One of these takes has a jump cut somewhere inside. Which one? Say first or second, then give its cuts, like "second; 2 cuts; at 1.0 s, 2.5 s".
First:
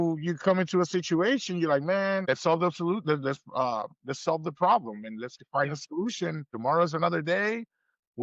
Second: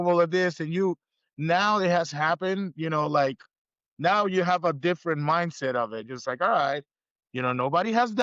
first; 2 cuts; at 2.3 s, 6.5 s